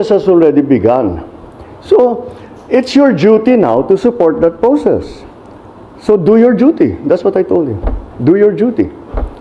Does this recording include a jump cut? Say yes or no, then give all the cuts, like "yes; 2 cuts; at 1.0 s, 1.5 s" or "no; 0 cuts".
no; 0 cuts